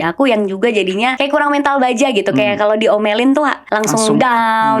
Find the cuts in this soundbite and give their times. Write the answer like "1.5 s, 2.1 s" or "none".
1.2 s, 3.6 s